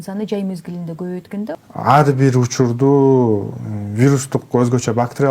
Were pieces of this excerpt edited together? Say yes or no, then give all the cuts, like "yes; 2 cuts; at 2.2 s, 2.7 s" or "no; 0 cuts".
yes; 1 cut; at 1.5 s